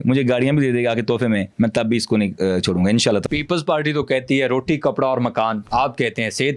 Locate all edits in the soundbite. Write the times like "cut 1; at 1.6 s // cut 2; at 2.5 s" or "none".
cut 1; at 3.2 s // cut 2; at 5.6 s